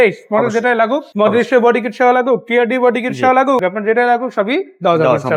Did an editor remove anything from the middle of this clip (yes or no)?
no